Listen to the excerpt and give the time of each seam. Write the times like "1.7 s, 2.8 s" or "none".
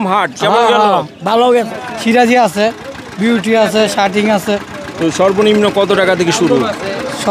1.8 s